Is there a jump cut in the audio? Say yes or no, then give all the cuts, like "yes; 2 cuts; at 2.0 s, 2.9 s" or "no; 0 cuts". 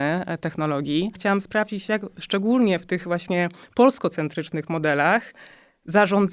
yes; 1 cut; at 1.2 s